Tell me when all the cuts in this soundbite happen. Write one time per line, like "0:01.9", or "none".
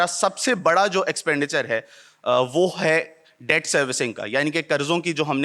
none